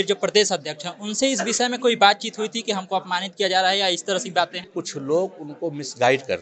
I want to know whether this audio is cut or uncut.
cut